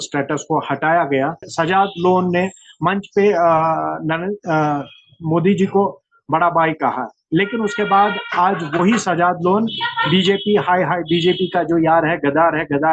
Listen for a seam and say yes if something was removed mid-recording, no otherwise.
yes